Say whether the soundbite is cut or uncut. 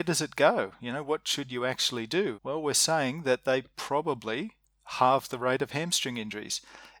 cut